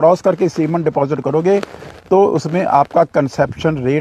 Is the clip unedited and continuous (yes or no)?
yes